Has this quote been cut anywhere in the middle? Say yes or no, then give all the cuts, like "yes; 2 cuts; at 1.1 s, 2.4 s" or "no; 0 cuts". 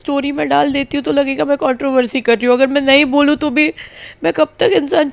no; 0 cuts